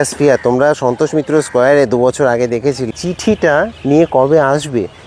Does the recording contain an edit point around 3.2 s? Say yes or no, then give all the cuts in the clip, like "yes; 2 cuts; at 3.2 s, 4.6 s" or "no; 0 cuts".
yes; 1 cut; at 3.2 s